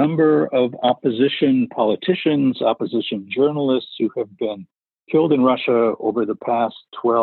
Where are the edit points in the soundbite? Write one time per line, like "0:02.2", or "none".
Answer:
none